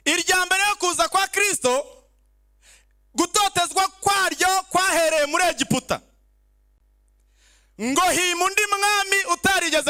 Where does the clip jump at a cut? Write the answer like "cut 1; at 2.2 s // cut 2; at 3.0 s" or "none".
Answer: none